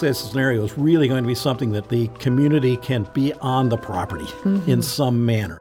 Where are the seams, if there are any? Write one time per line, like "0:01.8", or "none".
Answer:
0:01.8
0:03.1

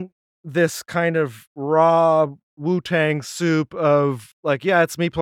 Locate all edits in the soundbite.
0:01.5
0:02.5
0:04.3

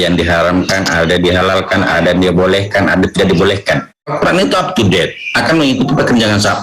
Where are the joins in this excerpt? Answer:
0:04.1

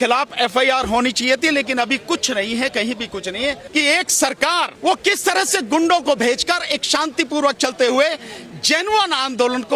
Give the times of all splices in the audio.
0:03.6
0:04.7

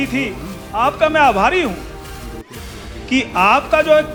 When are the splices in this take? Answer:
none

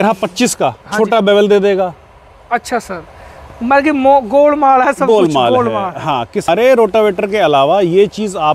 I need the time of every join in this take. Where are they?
0:06.5

